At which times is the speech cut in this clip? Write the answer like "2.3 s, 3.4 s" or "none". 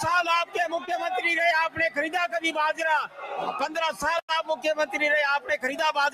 none

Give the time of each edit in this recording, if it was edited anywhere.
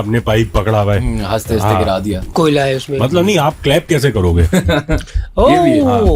2.2 s

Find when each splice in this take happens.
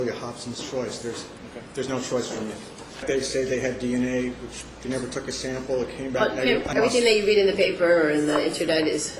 3.0 s, 6.7 s

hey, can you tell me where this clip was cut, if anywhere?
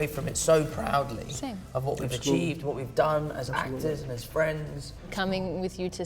5.1 s

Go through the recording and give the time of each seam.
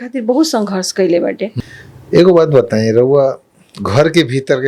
1.5 s

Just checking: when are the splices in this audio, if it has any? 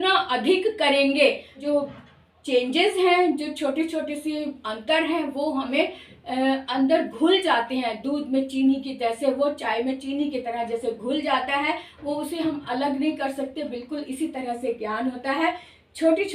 1.6 s

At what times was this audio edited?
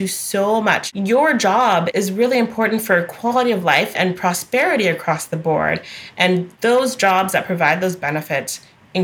0.8 s, 1.9 s, 3.9 s

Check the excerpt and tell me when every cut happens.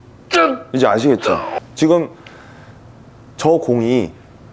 1.5 s

